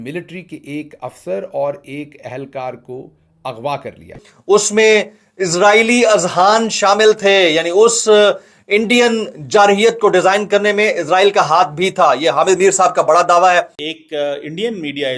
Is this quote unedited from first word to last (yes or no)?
yes